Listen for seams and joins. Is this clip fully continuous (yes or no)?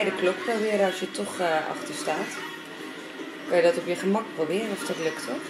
yes